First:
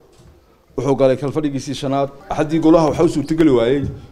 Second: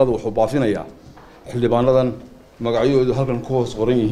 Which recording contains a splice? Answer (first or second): first